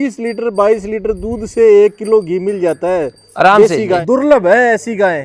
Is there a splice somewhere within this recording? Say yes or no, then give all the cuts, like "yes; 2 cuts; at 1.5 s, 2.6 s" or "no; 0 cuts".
yes; 1 cut; at 4.0 s